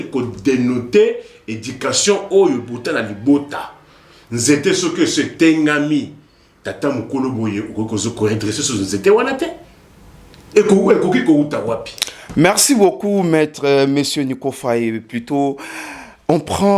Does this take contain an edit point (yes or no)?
no